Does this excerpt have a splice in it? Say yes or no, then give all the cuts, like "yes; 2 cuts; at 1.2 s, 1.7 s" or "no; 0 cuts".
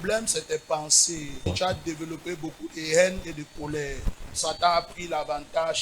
yes; 2 cuts; at 1.5 s, 4.4 s